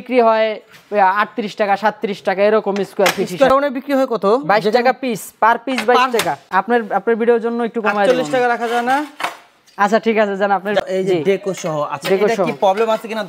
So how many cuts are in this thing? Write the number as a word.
three